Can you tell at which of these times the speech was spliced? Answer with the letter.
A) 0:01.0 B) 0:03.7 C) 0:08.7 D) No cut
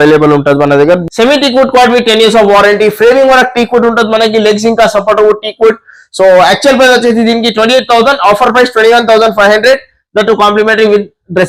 A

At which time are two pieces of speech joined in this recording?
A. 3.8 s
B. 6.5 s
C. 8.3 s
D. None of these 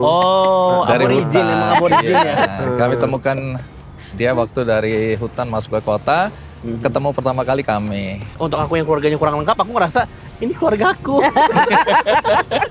C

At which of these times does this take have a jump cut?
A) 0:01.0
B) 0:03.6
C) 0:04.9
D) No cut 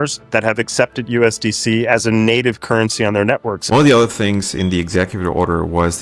B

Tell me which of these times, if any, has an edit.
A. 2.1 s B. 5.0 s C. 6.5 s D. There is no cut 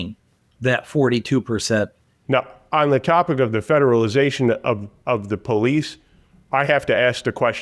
A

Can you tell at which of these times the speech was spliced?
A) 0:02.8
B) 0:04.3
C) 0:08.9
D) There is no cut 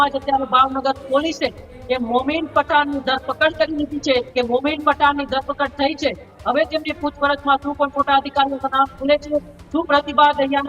B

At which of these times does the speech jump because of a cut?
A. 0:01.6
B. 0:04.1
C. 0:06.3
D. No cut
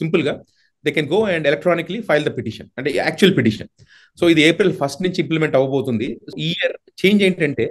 C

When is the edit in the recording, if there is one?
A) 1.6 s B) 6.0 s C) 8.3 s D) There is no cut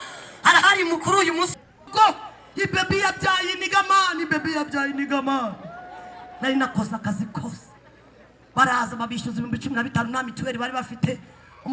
A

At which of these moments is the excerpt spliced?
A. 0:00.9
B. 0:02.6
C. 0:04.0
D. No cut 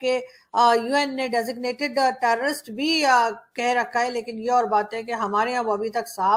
D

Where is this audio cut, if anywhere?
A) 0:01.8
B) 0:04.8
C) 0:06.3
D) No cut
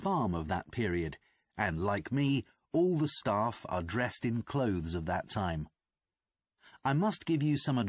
D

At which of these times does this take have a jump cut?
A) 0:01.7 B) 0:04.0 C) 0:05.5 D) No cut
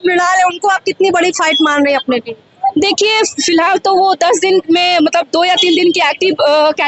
D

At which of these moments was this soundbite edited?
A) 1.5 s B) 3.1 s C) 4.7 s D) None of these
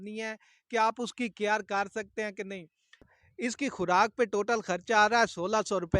B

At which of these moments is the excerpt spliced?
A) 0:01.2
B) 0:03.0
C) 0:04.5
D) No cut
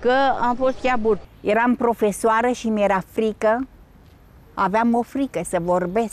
A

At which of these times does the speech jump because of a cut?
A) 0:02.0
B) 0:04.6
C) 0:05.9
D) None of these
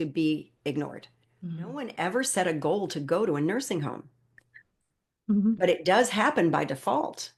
A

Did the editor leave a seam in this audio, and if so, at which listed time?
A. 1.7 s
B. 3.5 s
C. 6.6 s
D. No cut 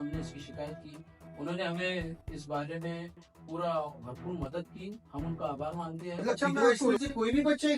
C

